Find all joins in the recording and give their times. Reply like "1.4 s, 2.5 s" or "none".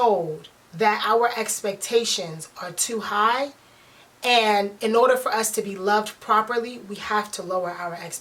none